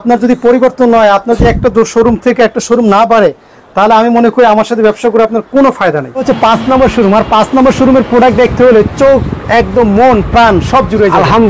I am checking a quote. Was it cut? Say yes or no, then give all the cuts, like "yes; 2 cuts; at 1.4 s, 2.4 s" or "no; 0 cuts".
yes; 1 cut; at 6.2 s